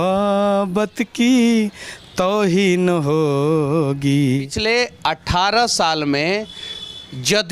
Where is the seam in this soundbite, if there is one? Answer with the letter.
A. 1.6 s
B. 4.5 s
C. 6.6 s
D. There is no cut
B